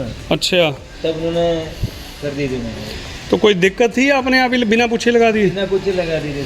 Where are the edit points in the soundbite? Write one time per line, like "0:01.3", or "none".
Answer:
none